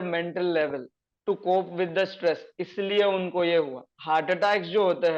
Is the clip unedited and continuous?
no; 1 cut; at 3.9 s

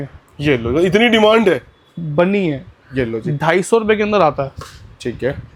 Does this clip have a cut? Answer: no; 0 cuts

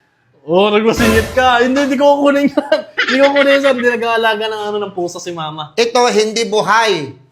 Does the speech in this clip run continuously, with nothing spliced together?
yes; 0 cuts

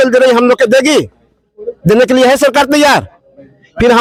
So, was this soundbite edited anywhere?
no; 0 cuts

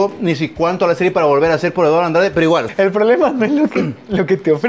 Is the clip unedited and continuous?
no; 1 cut; at 2.6 s

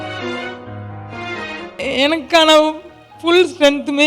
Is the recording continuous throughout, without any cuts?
no; 1 cut; at 1.8 s

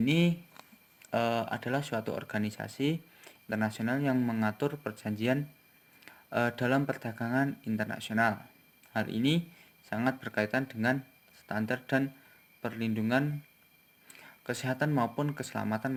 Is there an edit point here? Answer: no; 0 cuts

